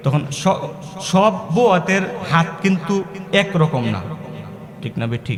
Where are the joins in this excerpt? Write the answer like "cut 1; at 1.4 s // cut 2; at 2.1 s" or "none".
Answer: none